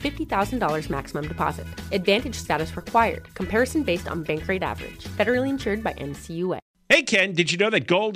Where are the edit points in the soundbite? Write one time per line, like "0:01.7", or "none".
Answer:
0:06.7

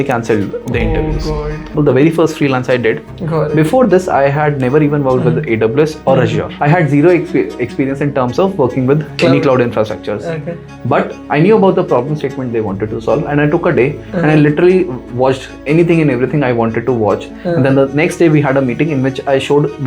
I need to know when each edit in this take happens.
0:01.7
0:03.1
0:06.5
0:17.2

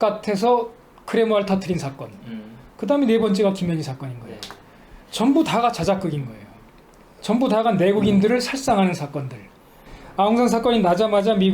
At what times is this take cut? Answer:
0:09.9

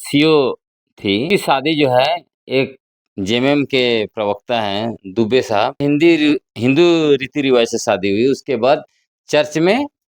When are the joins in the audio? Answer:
0:01.2
0:05.8

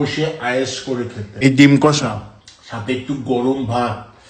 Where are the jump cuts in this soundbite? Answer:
0:01.4

